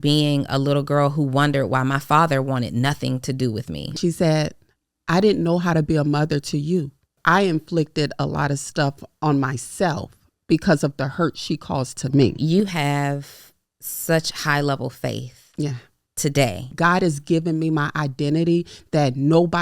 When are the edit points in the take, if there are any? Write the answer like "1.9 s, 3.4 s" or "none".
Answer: 4.0 s, 7.1 s, 12.4 s, 16.7 s